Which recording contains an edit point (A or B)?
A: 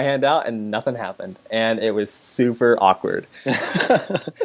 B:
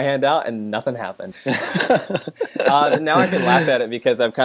B